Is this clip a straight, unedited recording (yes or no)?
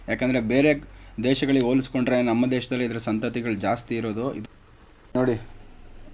no